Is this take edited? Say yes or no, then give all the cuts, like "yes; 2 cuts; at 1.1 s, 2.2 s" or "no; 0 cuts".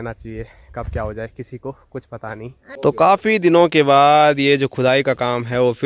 yes; 1 cut; at 2.6 s